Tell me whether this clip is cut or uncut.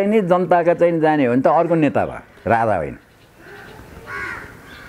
uncut